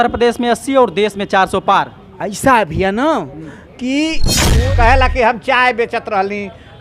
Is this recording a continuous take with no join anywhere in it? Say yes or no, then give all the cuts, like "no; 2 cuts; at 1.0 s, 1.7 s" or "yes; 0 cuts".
no; 1 cut; at 4.4 s